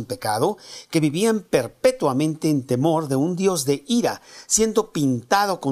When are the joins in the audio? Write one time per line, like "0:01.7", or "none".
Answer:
0:03.0